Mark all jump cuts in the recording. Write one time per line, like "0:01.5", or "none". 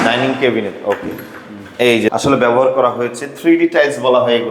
0:02.1